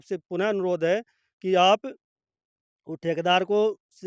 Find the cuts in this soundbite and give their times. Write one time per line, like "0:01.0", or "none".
none

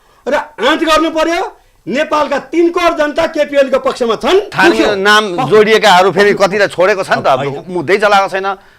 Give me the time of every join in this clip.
0:04.5

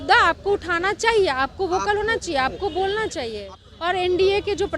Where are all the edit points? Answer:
0:03.6

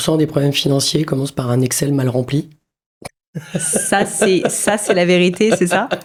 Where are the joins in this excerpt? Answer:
none

